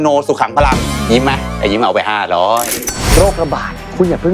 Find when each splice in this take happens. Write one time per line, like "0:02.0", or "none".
0:00.9
0:02.9